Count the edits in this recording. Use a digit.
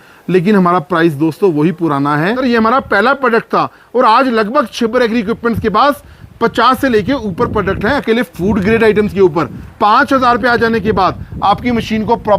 2